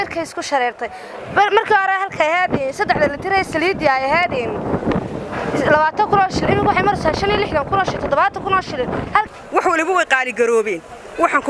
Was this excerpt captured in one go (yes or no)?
no